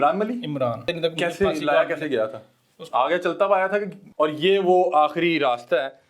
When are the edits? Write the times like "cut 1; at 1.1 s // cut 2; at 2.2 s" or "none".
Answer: cut 1; at 0.9 s // cut 2; at 4.0 s